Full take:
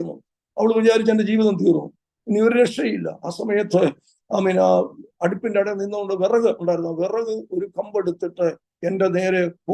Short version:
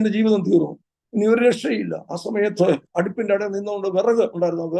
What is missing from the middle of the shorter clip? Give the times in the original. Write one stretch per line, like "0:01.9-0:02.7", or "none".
0:04.0-0:05.1

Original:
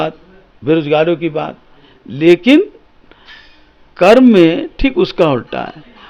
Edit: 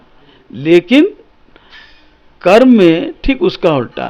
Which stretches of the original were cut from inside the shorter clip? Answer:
none

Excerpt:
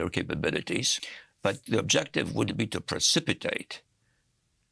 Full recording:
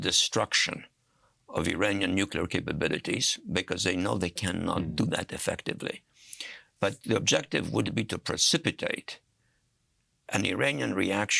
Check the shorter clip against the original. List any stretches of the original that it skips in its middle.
0:03.3-0:06.3

